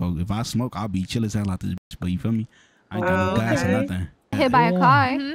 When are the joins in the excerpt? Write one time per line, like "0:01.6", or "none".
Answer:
0:04.3